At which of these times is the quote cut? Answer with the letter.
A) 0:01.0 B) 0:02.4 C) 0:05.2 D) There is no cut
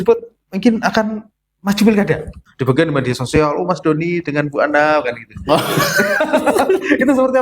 B